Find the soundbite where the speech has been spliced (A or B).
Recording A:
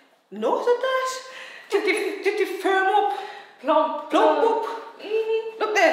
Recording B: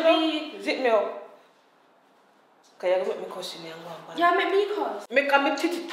B